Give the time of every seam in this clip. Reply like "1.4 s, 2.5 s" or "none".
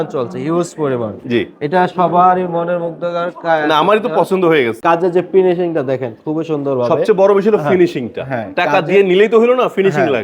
4.8 s